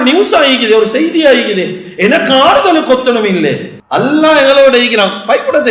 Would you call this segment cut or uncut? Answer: cut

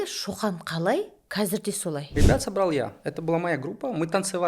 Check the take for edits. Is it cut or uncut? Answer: cut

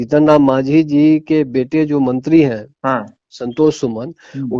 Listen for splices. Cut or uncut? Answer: uncut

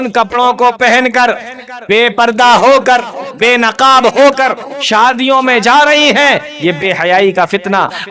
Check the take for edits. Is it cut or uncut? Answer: uncut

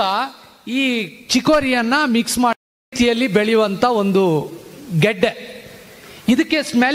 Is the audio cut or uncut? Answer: uncut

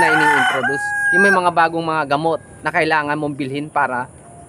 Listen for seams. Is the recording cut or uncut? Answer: cut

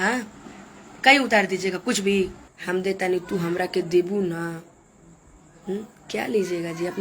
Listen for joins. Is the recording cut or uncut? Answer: cut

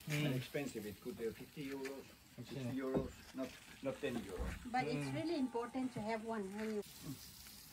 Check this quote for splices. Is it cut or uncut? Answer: cut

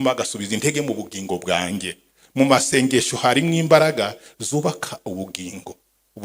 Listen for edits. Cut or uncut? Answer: uncut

